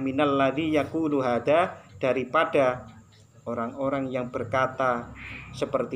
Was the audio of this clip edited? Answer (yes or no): no